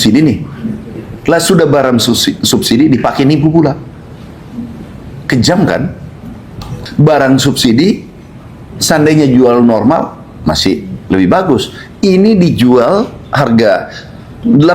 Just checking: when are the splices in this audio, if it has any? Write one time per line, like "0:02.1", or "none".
0:06.8